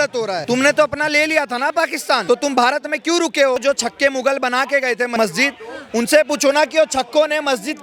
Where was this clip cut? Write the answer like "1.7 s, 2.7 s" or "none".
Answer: 2.2 s, 3.6 s, 5.1 s